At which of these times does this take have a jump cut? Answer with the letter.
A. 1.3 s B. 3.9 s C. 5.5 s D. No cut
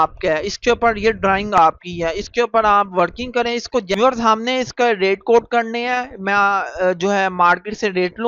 B